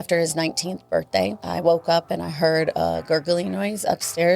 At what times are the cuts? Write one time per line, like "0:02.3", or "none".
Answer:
0:01.4